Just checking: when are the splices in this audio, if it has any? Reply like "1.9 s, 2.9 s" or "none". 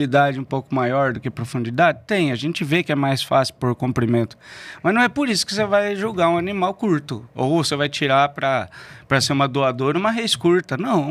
none